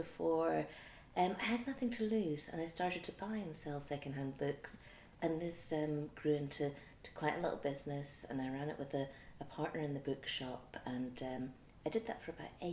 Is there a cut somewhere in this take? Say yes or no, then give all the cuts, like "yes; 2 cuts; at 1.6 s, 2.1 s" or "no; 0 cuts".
no; 0 cuts